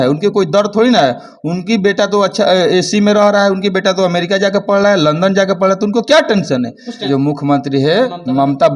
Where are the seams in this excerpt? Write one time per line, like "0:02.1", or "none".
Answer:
0:07.0

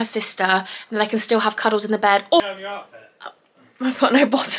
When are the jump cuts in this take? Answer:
0:02.4

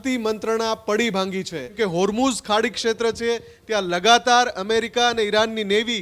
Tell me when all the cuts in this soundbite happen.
0:01.7

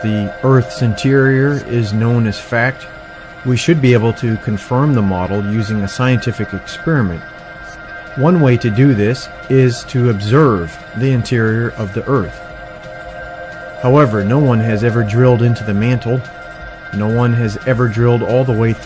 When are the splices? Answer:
0:01.3

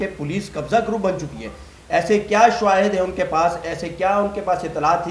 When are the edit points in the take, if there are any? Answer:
none

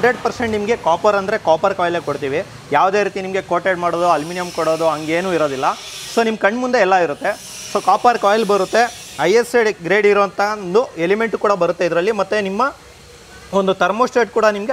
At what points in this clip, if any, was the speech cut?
none

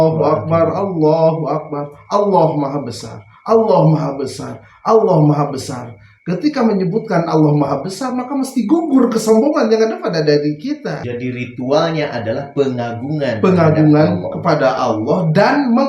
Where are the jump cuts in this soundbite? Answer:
0:11.0

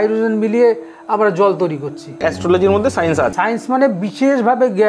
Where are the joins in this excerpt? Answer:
0:02.2
0:03.3

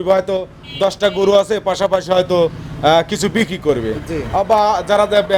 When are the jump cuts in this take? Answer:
none

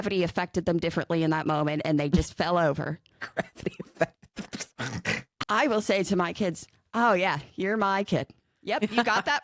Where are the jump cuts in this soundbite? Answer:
0:05.4

